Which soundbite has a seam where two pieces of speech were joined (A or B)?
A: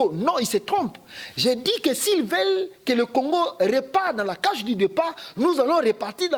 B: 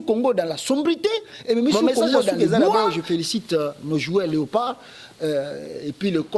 B